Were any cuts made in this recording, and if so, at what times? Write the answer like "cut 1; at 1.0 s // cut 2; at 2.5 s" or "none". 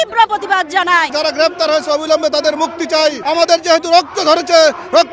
cut 1; at 1.1 s // cut 2; at 3.2 s